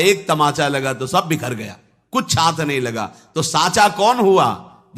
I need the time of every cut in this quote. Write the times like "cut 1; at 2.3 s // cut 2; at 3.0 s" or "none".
none